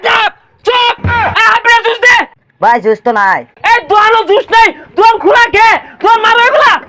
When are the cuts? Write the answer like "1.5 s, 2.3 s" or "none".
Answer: 2.3 s, 3.5 s